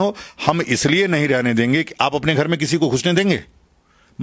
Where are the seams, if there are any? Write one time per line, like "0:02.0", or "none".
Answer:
none